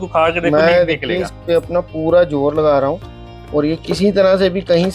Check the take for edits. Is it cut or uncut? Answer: uncut